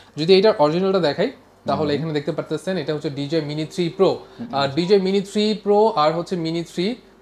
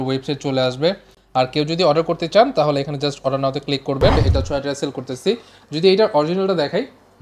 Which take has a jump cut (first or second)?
second